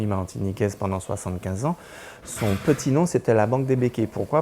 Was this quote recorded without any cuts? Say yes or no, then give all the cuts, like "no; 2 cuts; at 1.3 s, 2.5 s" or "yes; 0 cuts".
yes; 0 cuts